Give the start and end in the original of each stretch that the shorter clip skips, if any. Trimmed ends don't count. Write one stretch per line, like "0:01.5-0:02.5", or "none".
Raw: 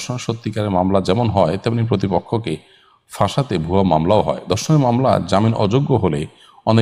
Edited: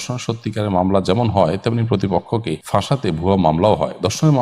0:02.6-0:03.0